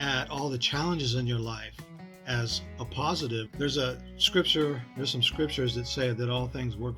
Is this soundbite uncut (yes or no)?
no